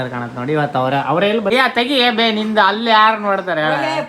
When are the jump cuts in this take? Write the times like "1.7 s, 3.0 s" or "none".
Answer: 1.5 s